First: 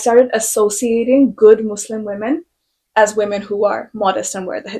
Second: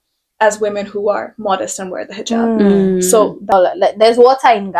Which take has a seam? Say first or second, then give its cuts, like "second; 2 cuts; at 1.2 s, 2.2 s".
second; 1 cut; at 3.5 s